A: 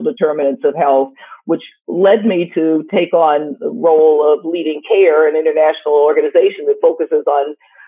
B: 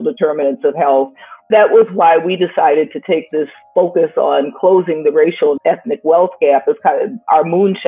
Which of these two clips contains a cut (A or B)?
B